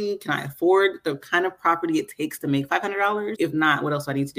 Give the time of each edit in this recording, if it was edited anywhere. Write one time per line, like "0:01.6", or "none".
0:03.3